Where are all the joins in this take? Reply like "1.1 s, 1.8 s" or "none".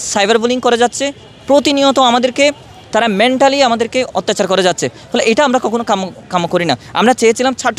none